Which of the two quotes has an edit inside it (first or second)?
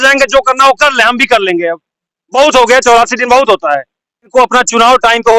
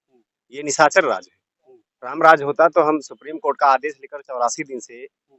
first